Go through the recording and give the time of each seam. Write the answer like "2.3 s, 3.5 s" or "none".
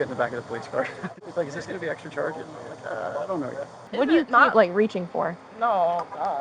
1.1 s, 3.9 s